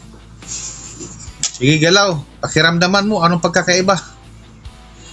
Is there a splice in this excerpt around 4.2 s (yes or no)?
yes